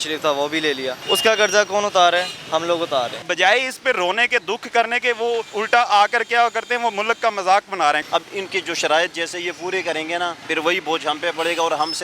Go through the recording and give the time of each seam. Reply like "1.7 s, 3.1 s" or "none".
1.0 s, 2.7 s, 5.5 s, 8.0 s, 10.4 s

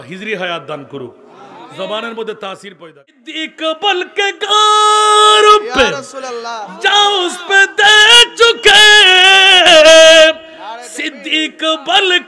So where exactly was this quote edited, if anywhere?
3.0 s

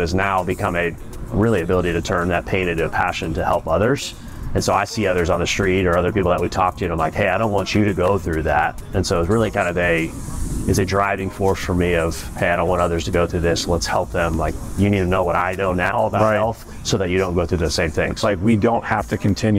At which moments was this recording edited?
18.2 s

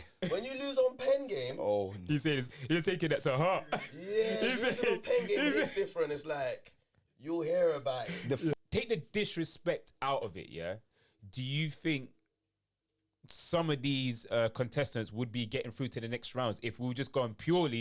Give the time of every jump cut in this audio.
8.5 s

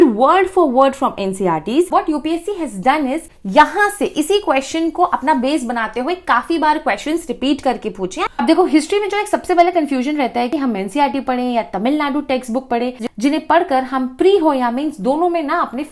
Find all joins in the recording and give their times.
1.9 s, 3.3 s, 8.4 s, 13.1 s

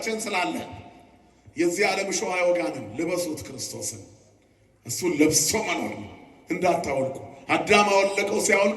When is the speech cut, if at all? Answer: none

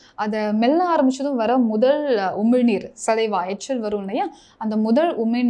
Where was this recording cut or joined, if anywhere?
none

